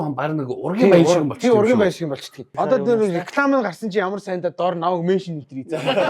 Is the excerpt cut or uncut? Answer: cut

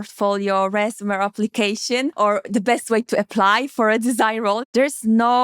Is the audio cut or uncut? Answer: cut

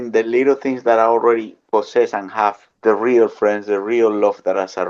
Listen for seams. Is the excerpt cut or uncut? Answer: cut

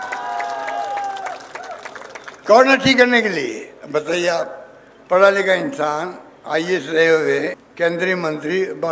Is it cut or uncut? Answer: cut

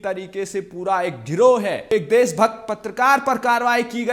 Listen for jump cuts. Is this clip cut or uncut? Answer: cut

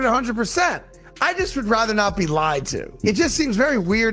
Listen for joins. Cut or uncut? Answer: cut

